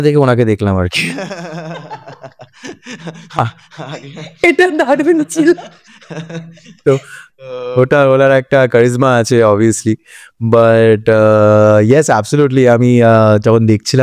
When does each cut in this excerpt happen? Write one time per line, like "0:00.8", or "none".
none

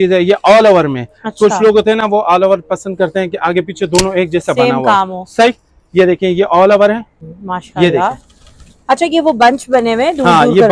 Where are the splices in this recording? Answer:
none

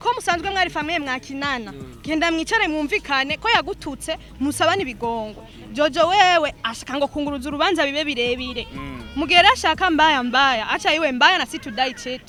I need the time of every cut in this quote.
none

